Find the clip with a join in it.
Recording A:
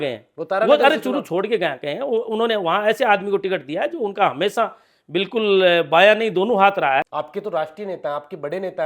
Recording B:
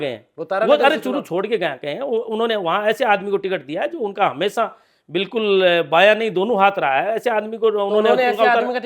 A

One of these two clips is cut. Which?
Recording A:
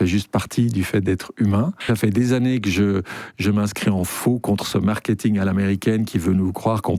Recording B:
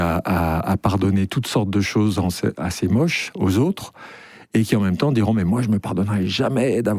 A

